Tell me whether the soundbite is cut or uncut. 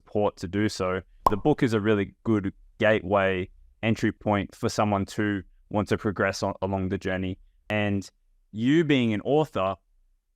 cut